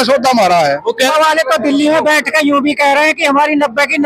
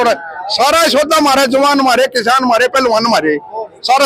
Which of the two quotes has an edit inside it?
first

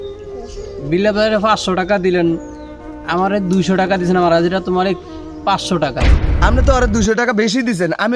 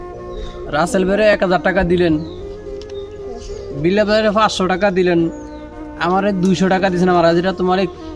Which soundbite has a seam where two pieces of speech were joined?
first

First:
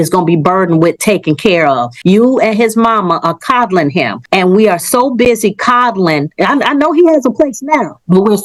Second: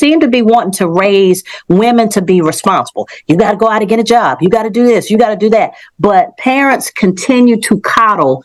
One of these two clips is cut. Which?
first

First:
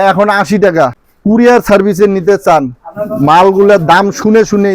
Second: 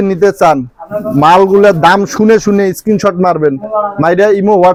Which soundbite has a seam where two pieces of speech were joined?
first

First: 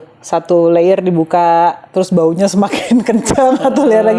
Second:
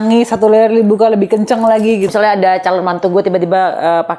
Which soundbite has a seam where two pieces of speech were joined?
second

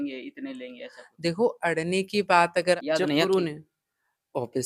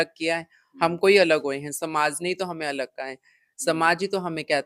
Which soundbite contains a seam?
first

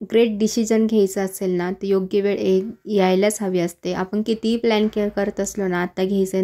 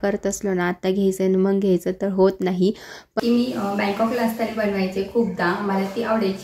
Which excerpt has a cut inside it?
second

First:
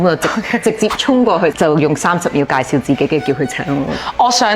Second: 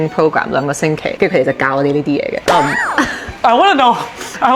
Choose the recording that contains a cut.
second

